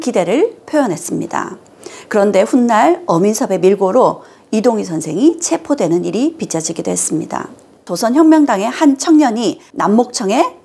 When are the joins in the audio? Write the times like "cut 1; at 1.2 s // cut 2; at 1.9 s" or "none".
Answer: cut 1; at 7.9 s